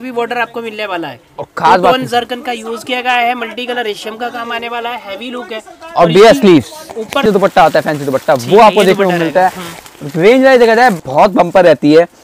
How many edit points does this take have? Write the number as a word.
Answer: two